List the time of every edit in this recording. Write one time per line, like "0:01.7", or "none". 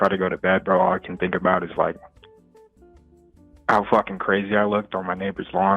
none